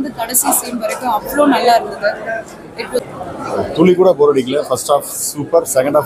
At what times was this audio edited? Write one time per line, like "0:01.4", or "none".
0:03.0

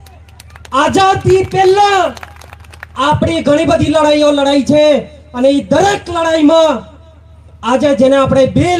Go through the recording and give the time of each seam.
none

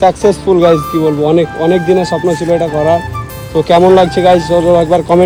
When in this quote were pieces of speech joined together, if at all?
none

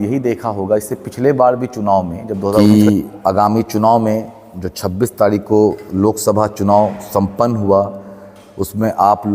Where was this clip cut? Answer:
0:02.6

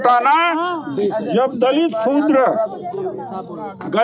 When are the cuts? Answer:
none

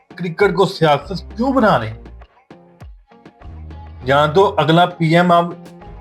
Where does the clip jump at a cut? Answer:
none

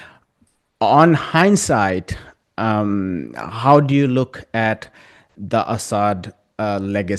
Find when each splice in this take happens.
none

